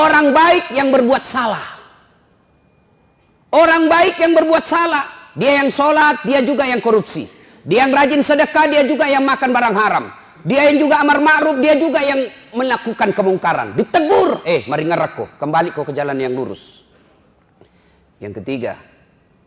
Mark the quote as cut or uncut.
uncut